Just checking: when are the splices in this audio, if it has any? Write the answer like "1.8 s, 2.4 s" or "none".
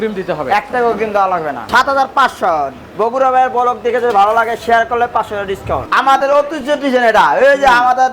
1.7 s, 5.9 s